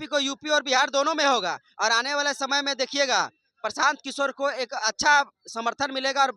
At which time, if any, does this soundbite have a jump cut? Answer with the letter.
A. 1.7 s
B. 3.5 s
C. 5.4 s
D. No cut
D